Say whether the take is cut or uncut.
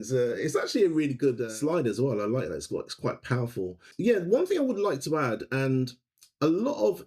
cut